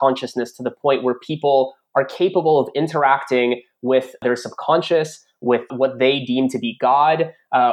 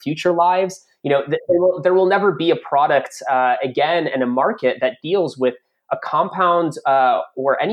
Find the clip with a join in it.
first; 2 cuts; at 4.2 s, 5.7 s

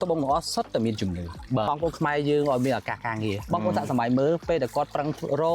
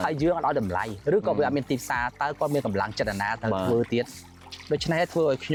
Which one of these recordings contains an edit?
first; 1 cut; at 1.7 s

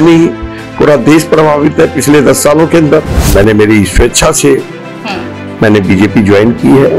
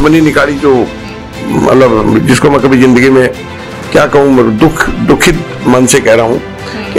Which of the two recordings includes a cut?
first; 1 cut; at 3.2 s

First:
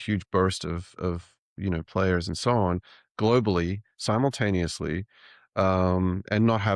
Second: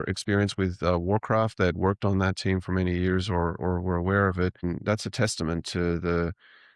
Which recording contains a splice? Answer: second; 1 cut; at 4.6 s

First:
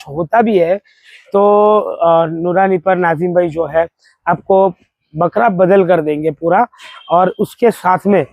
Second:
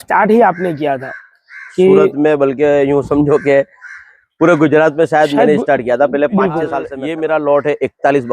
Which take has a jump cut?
second; 1 cut; at 6.9 s

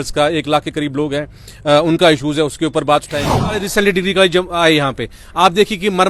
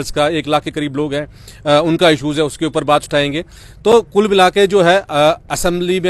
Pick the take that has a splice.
first; 1 cut; at 3.7 s

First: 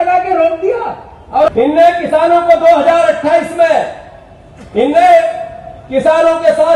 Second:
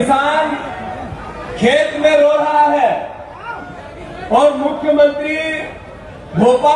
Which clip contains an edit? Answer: first; 1 cut; at 1.5 s

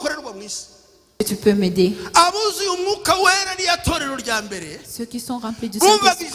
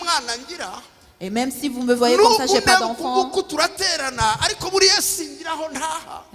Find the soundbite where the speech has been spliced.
first; 1 cut; at 1.2 s

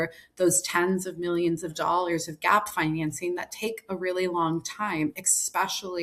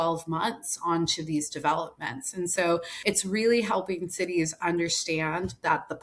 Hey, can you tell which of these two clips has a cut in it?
second; 1 cut; at 2.9 s

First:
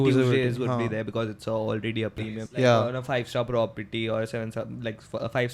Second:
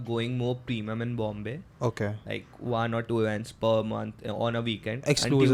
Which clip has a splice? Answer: first; 1 cut; at 2.3 s

